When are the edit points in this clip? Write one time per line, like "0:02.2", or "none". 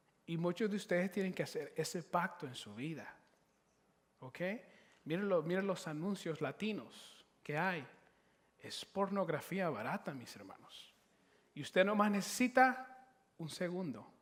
none